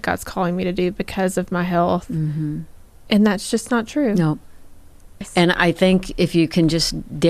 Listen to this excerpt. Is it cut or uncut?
cut